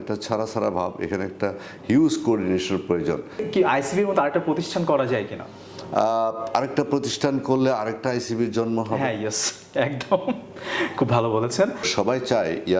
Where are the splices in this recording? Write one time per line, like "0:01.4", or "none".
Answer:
0:03.4
0:11.9